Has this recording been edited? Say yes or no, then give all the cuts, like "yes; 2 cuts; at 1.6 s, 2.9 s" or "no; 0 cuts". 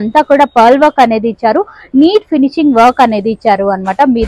no; 0 cuts